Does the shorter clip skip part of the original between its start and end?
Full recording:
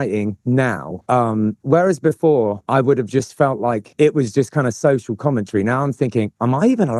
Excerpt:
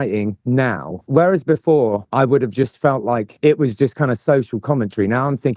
yes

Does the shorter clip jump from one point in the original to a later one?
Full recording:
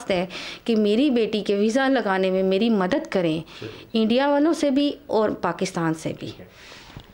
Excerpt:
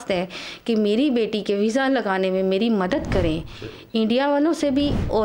no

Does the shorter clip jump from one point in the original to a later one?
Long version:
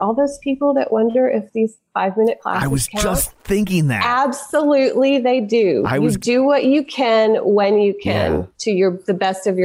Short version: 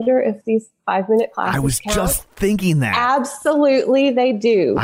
no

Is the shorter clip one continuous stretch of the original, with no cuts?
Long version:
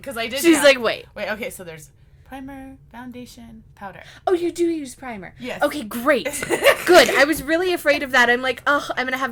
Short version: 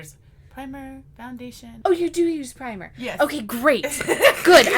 no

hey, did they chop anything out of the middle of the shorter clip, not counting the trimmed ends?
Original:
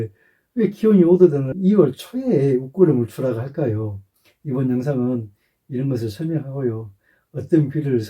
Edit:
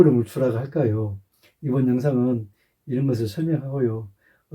no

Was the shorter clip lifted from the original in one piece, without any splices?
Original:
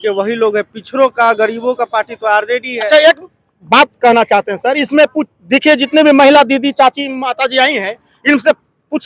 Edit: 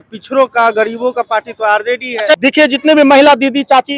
no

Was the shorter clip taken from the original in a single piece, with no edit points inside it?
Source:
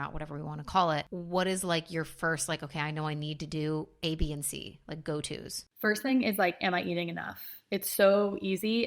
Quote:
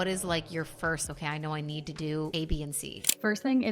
no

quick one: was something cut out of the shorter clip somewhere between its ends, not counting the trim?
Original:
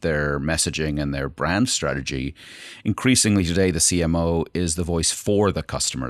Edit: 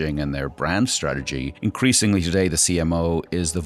yes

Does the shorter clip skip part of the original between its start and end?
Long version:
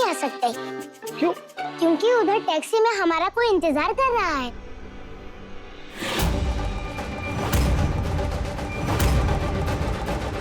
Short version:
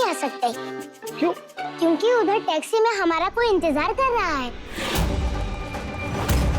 yes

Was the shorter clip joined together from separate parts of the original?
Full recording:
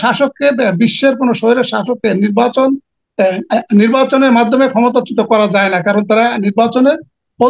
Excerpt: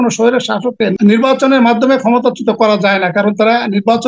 yes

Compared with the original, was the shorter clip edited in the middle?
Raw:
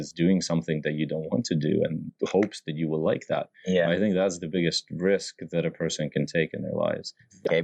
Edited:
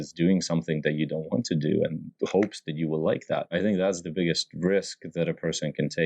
yes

